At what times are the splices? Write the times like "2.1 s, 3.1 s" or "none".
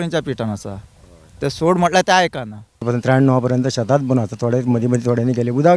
2.9 s